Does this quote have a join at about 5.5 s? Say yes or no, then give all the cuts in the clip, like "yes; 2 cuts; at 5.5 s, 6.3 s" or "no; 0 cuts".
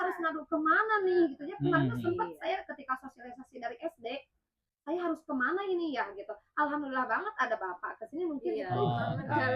no; 0 cuts